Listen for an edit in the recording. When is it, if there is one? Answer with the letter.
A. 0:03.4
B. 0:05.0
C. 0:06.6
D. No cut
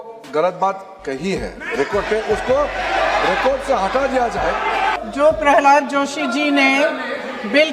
B